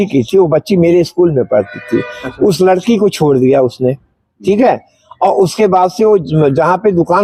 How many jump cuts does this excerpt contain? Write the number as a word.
zero